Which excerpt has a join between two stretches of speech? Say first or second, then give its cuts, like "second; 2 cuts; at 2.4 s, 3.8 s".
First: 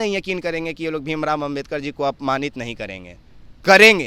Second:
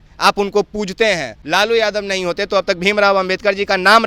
second; 1 cut; at 1.3 s